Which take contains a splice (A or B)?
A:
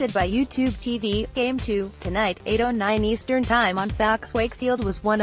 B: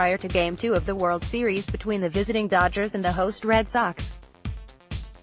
B